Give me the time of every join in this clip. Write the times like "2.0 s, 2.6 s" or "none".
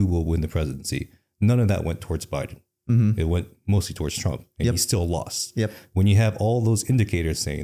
none